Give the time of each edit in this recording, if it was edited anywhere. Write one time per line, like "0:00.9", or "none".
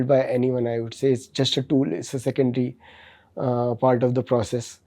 none